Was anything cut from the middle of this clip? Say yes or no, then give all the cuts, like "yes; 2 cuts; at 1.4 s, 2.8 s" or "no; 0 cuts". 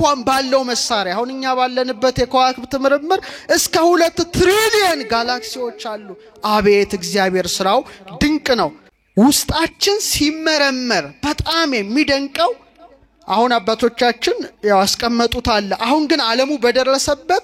yes; 1 cut; at 8.9 s